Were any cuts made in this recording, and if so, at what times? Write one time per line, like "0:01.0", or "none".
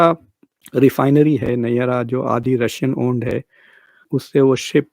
none

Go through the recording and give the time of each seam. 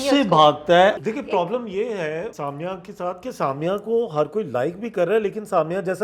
0:00.9
0:02.3

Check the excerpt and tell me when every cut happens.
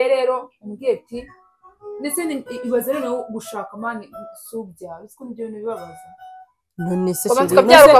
none

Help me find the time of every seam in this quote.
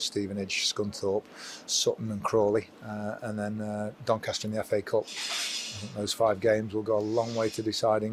none

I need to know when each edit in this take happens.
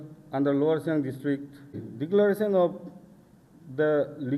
0:01.9

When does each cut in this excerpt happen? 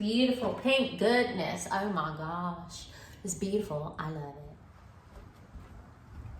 0:04.5

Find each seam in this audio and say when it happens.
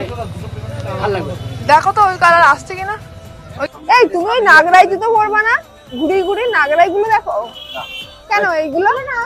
0:03.7

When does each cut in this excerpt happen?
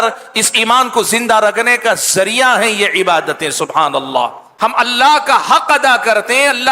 0:04.4

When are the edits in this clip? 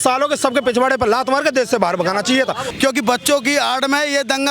0:02.7

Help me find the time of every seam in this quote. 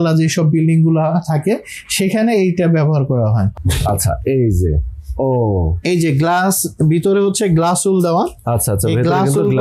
0:03.5

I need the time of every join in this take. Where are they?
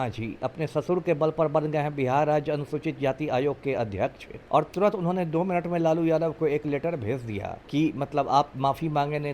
0:04.3
0:07.5

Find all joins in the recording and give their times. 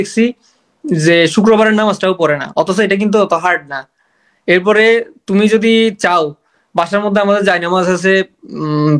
none

